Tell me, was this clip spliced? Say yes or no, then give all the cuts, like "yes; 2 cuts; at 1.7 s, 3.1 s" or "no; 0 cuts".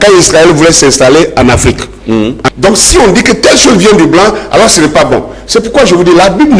yes; 1 cut; at 2.4 s